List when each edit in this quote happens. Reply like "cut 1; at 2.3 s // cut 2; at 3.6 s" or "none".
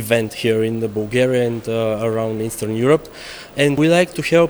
none